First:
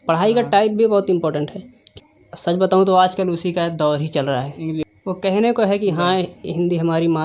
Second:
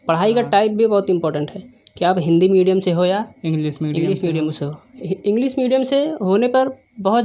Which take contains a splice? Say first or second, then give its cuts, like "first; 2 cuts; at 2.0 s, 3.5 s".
first; 2 cuts; at 1.9 s, 4.9 s